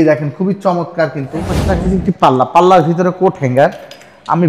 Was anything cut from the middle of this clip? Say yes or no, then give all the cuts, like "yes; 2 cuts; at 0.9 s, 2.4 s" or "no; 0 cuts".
yes; 1 cut; at 1.6 s